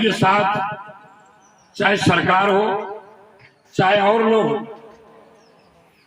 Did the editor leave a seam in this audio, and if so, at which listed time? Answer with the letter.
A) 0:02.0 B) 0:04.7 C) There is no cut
C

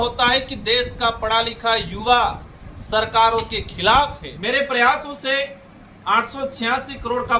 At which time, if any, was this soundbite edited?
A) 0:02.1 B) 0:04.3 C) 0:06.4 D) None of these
B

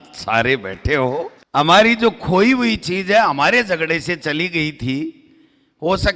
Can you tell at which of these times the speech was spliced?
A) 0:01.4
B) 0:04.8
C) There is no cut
A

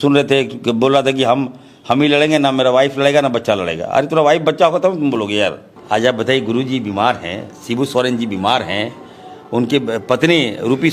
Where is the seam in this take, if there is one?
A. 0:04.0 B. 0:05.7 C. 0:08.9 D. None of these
B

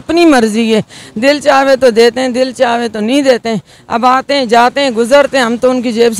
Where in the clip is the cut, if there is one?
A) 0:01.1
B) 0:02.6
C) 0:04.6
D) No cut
D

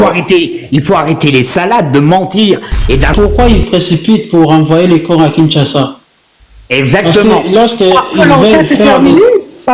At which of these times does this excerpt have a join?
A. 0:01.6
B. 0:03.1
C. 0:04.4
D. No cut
B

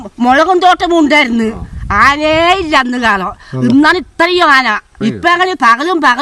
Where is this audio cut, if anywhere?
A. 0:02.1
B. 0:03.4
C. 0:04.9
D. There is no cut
C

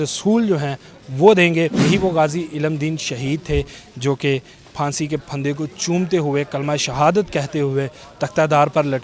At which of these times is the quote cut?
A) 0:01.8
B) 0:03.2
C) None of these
A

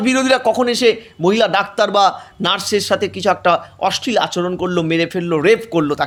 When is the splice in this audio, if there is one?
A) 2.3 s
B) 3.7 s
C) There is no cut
C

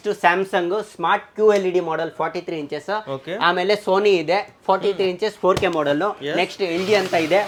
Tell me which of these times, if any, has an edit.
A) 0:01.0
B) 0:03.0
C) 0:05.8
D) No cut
D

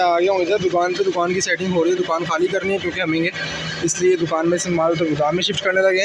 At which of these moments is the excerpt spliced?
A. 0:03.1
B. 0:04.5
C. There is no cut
C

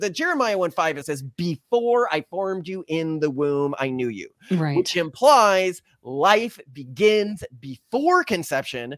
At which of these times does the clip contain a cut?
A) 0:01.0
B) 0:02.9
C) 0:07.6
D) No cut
A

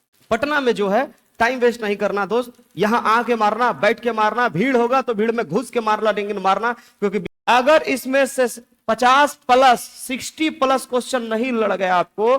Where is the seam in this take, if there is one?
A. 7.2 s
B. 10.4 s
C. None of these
A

